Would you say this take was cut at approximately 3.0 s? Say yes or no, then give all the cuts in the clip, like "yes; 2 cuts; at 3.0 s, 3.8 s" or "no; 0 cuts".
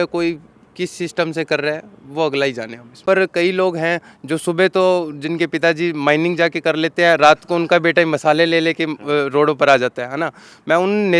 yes; 1 cut; at 3.0 s